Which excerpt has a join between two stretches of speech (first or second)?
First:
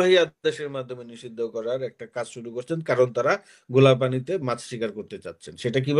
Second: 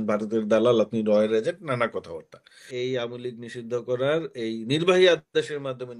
second